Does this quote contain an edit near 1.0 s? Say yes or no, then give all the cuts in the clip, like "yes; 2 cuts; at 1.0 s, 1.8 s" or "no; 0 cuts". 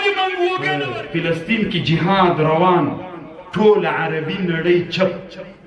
yes; 1 cut; at 1.0 s